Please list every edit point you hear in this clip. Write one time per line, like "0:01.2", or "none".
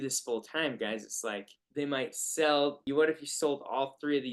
0:01.6
0:02.8